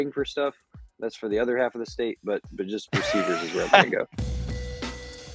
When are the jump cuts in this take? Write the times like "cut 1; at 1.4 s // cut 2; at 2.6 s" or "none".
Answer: cut 1; at 4.1 s